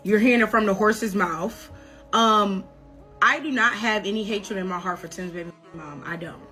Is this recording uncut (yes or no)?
yes